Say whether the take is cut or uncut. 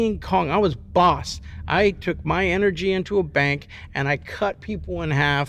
uncut